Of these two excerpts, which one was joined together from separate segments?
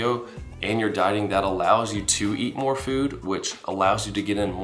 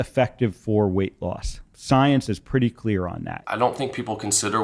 second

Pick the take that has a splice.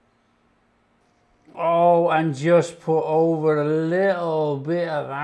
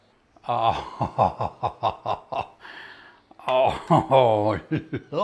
first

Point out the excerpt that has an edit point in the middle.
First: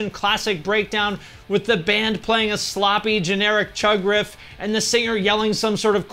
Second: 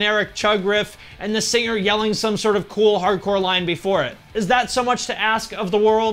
second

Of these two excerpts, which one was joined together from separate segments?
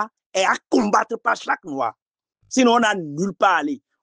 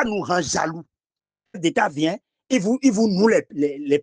second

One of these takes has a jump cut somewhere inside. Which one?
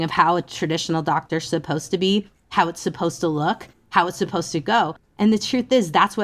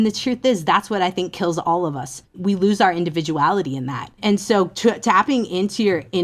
second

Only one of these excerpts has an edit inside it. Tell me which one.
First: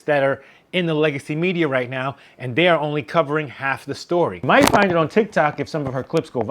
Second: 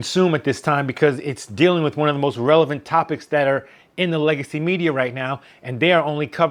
first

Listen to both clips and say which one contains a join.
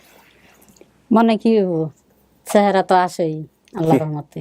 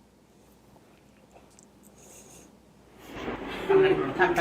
second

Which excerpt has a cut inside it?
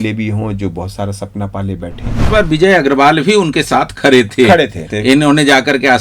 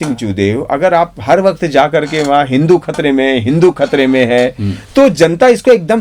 first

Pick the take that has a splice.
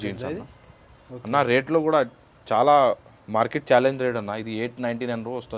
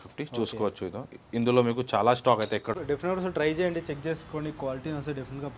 second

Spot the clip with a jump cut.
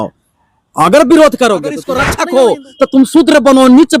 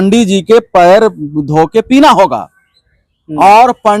first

